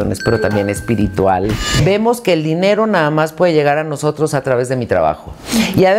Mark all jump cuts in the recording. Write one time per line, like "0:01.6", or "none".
0:01.7